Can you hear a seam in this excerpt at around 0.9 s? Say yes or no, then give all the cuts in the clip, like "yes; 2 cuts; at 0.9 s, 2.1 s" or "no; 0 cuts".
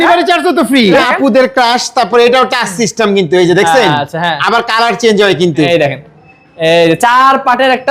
yes; 2 cuts; at 0.9 s, 5.7 s